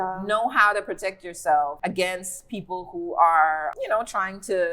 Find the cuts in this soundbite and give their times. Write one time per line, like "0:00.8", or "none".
0:01.8
0:03.7